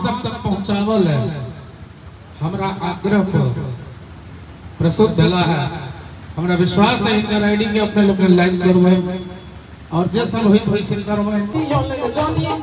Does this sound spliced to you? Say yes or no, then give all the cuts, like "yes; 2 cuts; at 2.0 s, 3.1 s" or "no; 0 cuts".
yes; 1 cut; at 11.5 s